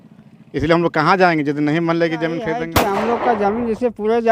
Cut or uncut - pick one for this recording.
cut